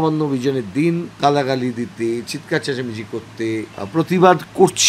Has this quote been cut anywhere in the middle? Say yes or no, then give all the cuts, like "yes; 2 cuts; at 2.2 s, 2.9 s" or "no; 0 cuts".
yes; 2 cuts; at 1.1 s, 3.8 s